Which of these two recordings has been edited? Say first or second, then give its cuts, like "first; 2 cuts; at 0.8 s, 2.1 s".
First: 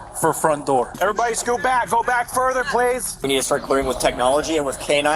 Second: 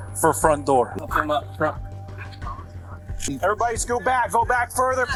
first; 2 cuts; at 0.9 s, 3.1 s